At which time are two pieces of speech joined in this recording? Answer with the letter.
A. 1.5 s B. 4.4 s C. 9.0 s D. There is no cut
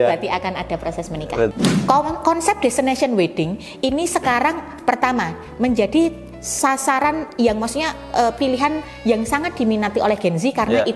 A